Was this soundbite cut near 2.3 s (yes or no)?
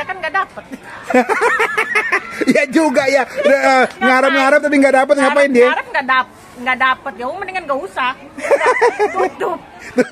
no